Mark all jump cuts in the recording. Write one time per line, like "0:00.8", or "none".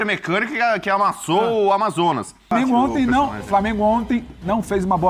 0:02.5